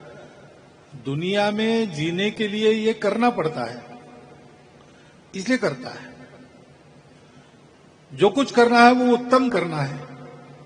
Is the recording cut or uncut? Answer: uncut